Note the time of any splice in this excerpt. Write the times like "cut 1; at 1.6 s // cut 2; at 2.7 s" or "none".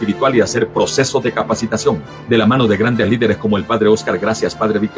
cut 1; at 0.9 s